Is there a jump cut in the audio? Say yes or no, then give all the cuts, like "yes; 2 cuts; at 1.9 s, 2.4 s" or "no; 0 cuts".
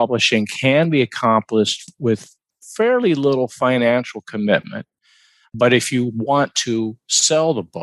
no; 0 cuts